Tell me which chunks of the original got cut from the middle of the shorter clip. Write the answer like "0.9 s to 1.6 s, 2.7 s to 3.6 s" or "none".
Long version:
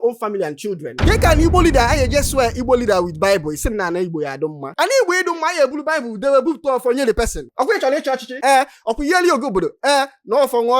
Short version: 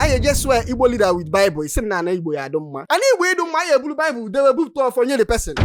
none